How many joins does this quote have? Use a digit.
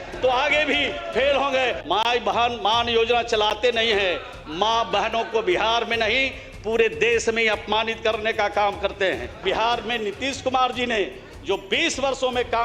2